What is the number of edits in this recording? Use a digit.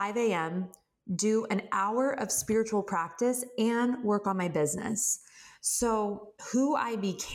1